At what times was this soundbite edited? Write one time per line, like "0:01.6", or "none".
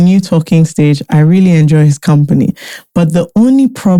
none